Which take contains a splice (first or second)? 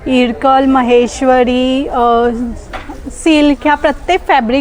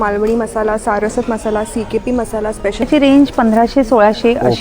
second